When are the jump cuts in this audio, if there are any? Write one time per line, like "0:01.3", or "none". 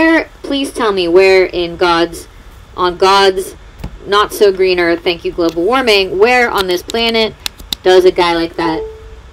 none